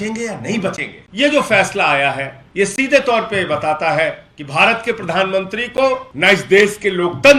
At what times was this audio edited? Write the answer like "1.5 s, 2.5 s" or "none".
1.0 s, 2.4 s, 4.3 s, 6.1 s